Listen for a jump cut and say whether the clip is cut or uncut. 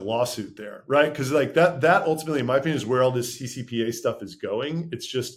uncut